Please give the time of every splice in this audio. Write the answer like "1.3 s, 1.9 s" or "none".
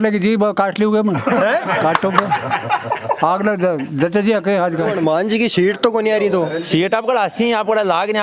4.9 s